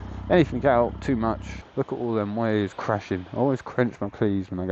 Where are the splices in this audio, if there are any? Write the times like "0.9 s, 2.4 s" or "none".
1.6 s